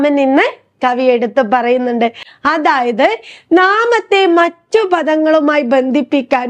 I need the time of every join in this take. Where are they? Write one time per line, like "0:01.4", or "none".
0:02.3